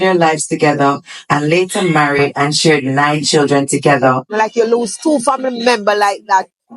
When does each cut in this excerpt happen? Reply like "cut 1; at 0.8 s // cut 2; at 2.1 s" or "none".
cut 1; at 4.4 s

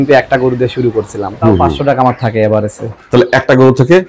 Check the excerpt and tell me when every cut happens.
cut 1; at 1.7 s

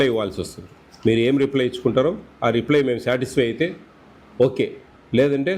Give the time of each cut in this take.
none

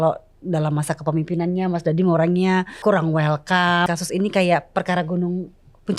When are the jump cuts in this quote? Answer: cut 1; at 2.7 s // cut 2; at 3.9 s

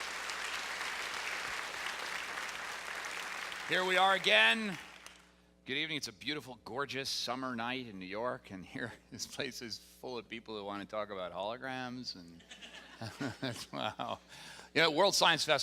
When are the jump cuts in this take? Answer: cut 1; at 12.6 s

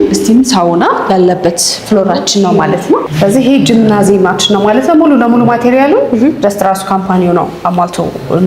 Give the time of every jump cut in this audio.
cut 1; at 3.1 s

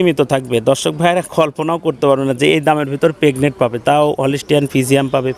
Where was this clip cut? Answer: none

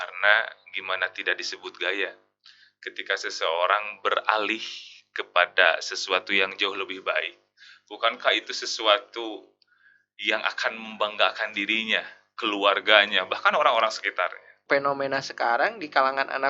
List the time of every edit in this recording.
cut 1; at 14.6 s

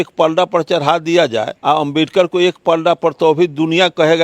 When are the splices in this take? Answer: cut 1; at 1.5 s

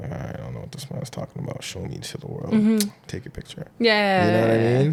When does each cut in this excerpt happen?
none

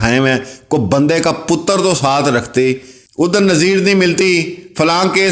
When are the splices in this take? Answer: cut 1; at 3.0 s

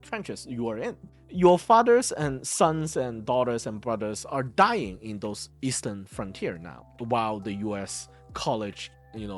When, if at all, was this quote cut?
cut 1; at 1.1 s

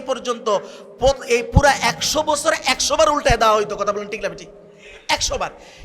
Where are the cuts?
none

